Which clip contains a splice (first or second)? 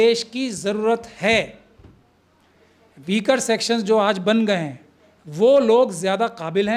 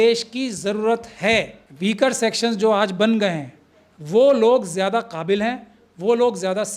second